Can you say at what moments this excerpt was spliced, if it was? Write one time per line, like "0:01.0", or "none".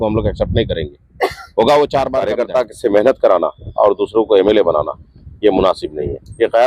0:02.3